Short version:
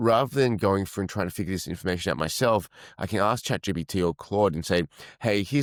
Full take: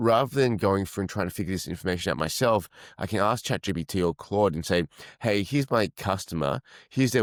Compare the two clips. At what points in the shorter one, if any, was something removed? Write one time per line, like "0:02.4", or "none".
none

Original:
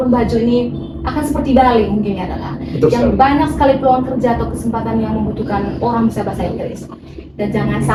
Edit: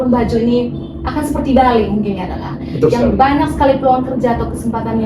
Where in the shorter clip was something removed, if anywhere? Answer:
none

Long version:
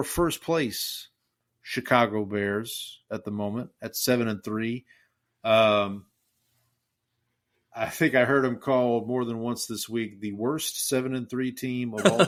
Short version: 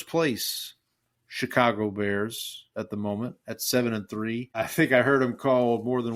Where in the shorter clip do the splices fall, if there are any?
0:04.5

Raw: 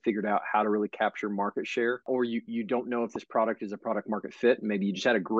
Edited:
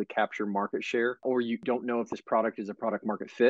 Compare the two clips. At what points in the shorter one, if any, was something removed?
0:01.6

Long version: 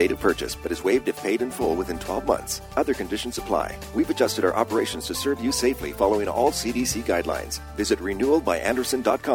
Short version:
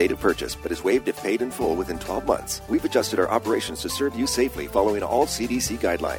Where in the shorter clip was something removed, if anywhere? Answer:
0:02.5

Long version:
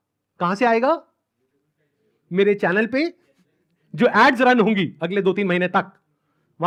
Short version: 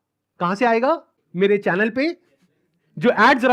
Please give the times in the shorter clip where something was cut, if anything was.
0:01.2

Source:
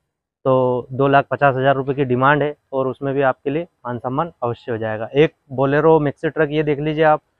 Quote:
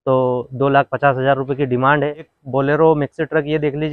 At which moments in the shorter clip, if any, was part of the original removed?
0:02.3

